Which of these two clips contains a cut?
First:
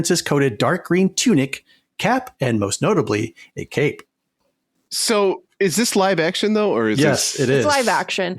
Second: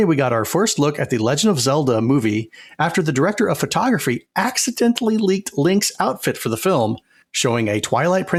first; 1 cut; at 4.4 s

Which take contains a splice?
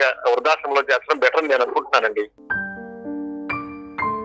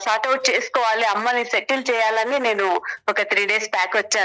first; 1 cut; at 2.4 s

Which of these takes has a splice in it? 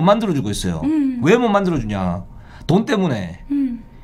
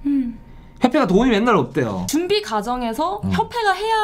second; 1 cut; at 2.0 s

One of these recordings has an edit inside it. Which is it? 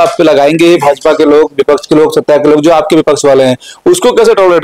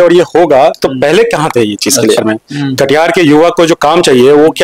second; 1 cut; at 2.2 s

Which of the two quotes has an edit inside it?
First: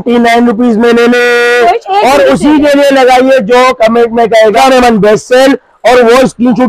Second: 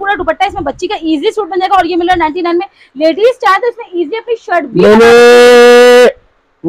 first; 2 cuts; at 1.8 s, 4.6 s

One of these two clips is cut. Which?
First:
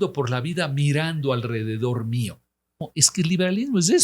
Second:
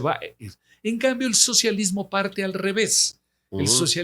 first; 1 cut; at 2.8 s

